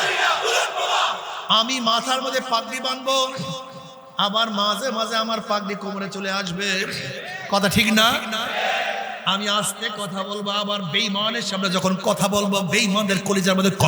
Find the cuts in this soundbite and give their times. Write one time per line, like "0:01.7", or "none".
0:01.3